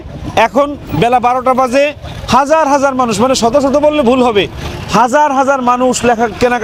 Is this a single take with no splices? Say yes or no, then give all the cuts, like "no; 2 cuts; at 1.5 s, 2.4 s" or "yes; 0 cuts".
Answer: yes; 0 cuts